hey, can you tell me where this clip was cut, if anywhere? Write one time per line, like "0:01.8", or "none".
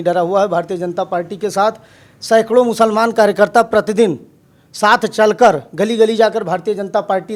none